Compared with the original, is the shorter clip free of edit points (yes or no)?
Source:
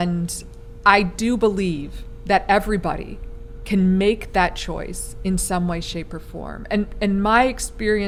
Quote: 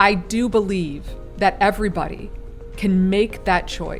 yes